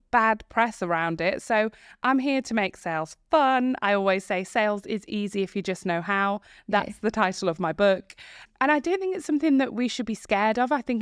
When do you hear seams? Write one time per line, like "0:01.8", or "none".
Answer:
none